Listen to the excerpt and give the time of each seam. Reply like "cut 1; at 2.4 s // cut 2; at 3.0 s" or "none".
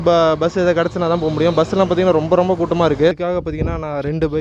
cut 1; at 3.2 s